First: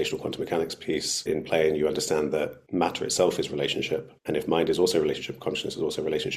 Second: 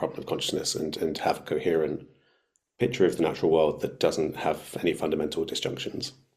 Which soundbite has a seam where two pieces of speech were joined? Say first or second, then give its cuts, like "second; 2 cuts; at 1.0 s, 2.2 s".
first; 3 cuts; at 1.3 s, 2.6 s, 4.1 s